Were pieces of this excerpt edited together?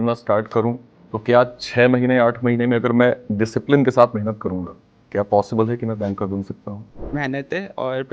yes; 1 cut; at 7.0 s

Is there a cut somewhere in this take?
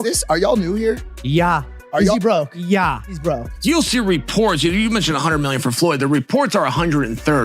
yes; 1 cut; at 3.5 s

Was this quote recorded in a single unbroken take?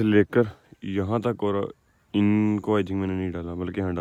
yes; 0 cuts

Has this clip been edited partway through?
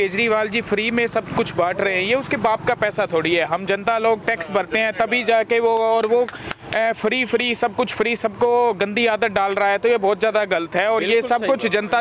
no; 0 cuts

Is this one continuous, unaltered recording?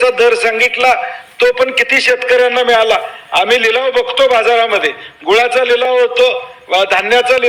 yes; 0 cuts

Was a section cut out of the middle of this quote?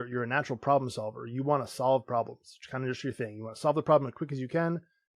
no; 0 cuts

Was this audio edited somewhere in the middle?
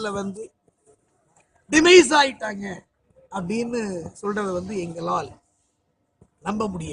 no; 0 cuts

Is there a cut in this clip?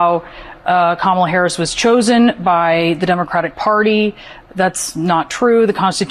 no; 0 cuts

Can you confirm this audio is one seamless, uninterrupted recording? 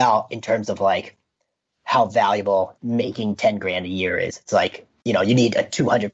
no; 1 cut; at 2.8 s

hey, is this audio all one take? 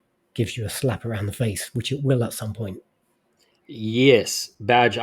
yes; 0 cuts

